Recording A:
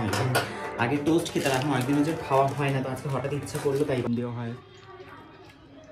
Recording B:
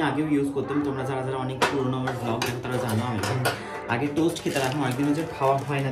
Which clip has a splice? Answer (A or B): A